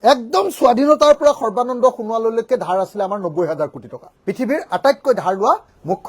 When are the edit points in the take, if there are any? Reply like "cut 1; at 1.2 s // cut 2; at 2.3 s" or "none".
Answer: cut 1; at 4.1 s